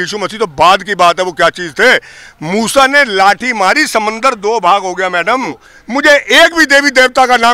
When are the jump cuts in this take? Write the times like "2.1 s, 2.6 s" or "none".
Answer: 5.7 s